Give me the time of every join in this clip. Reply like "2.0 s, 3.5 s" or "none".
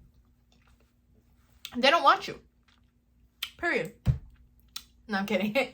none

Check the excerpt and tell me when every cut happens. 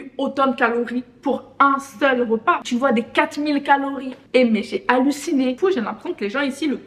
2.6 s, 5.6 s

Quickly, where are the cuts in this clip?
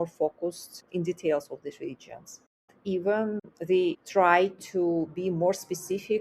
3.4 s

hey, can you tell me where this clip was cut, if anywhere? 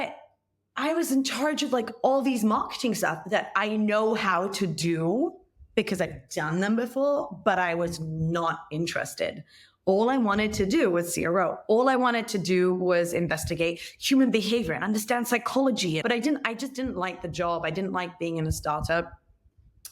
16.0 s

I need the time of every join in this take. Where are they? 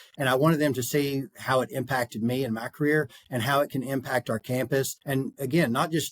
5.0 s

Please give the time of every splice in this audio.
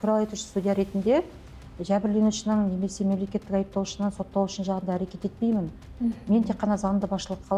none

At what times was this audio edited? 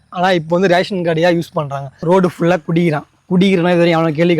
2.0 s

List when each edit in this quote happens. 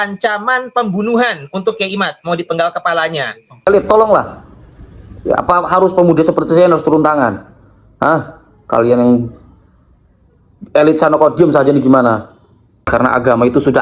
3.6 s, 12.9 s

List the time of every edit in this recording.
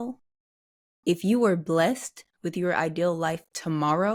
none

